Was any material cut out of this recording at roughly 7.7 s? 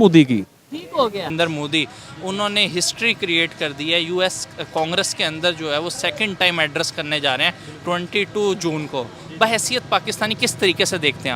no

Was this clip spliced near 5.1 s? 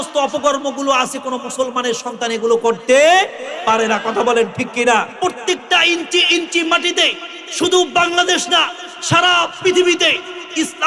yes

